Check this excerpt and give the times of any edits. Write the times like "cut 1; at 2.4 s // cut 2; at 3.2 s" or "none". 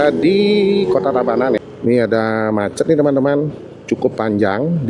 cut 1; at 1.6 s